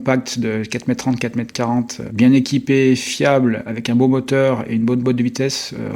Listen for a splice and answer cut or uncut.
uncut